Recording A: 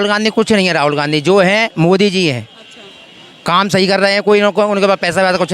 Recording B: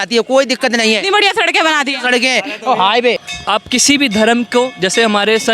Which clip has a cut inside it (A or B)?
B